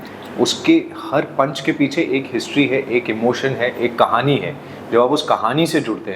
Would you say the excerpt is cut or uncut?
uncut